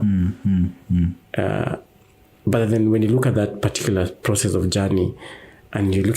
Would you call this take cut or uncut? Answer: uncut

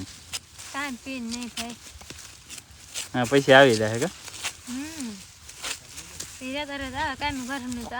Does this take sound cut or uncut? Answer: uncut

